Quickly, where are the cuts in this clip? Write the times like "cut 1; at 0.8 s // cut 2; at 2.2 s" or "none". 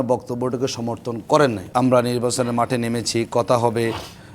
cut 1; at 1.6 s